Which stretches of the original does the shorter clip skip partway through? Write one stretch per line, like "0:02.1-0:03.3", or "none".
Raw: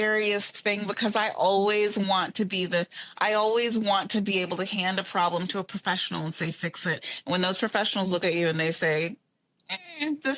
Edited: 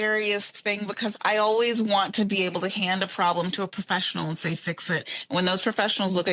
0:01.1-0:03.1

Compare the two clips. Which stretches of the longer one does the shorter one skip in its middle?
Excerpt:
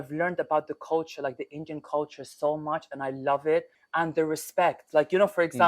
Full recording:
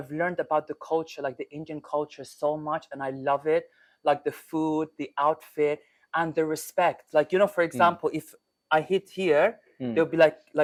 0:03.8-0:06.0

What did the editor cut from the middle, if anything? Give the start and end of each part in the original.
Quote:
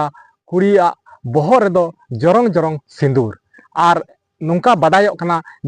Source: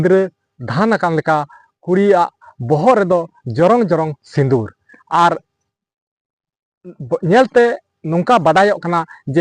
0:05.6-0:07.9

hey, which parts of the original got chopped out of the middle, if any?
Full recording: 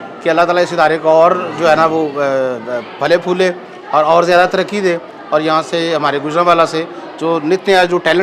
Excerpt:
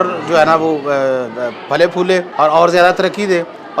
0:03.6-0:03.8

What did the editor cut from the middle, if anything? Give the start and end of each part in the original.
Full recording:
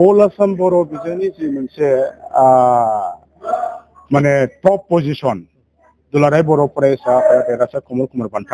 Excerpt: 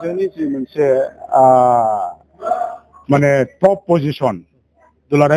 none

